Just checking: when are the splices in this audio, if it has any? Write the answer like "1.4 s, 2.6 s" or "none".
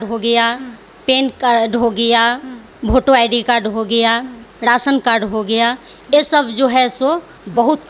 none

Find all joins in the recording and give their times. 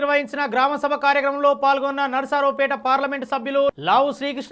none

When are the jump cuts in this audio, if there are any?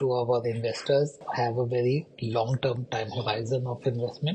1.2 s

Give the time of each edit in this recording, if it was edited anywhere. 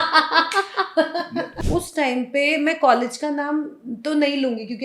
1.5 s

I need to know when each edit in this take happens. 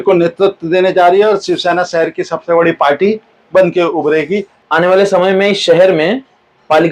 4.5 s

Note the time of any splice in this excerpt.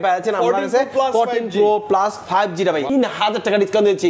2.9 s

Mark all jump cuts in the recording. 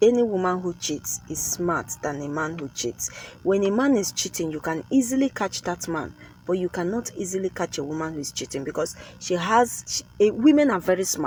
none

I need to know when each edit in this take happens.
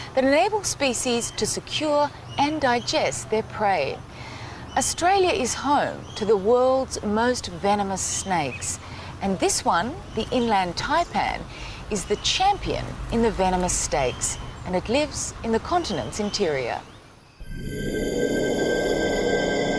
2.9 s

